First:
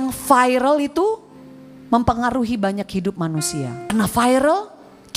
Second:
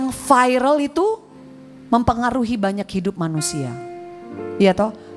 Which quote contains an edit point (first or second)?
first